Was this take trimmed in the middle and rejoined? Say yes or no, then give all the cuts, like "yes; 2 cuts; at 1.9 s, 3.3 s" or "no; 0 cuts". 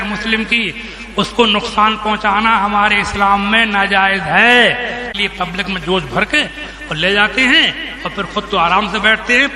yes; 1 cut; at 5.1 s